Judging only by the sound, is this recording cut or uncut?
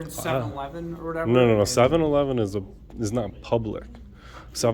uncut